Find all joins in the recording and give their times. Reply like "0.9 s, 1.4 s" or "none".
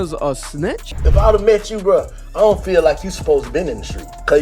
0.9 s